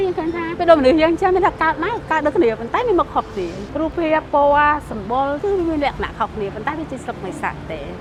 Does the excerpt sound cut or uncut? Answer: uncut